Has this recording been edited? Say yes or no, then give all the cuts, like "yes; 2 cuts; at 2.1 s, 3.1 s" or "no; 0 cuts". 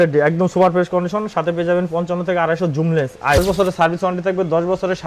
yes; 1 cut; at 3.4 s